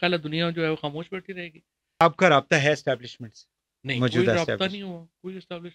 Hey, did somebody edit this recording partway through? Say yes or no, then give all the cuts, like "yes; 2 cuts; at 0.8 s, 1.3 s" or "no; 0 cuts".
yes; 1 cut; at 2.0 s